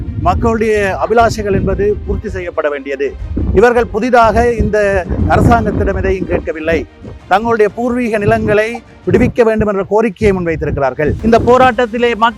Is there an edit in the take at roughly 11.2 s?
yes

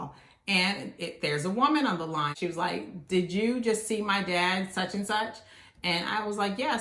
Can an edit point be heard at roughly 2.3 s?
yes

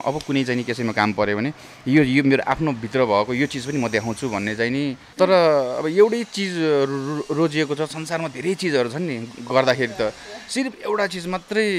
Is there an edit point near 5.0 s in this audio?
yes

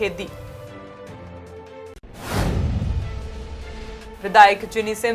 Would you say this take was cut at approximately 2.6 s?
no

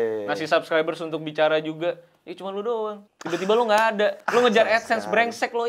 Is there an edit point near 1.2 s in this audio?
no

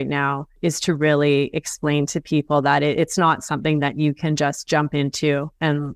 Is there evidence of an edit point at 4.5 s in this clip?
no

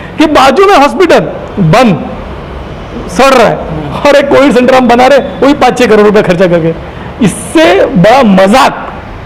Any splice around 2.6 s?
no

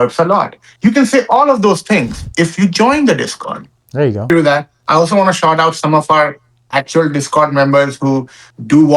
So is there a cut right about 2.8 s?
no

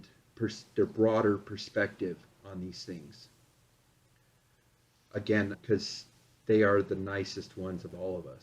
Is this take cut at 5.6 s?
yes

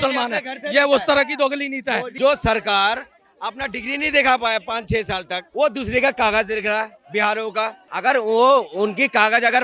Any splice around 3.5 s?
no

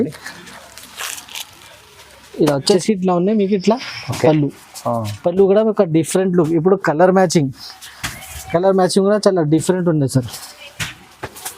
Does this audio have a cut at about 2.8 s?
yes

